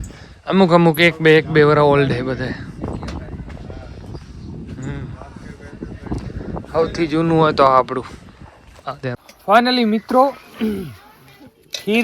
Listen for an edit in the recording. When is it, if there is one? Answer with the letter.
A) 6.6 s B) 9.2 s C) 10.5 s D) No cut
B